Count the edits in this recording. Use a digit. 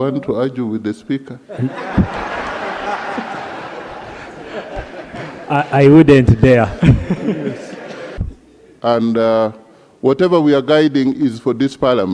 1